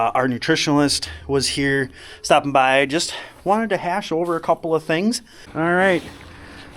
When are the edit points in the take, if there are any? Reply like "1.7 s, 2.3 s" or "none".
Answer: 5.4 s